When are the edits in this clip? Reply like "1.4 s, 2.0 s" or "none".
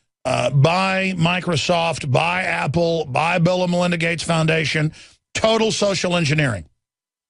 none